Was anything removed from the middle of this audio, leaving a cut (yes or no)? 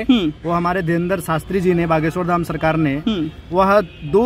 no